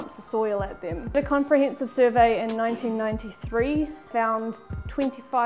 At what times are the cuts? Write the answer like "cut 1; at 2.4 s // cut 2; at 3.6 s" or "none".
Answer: cut 1; at 1.2 s // cut 2; at 4.1 s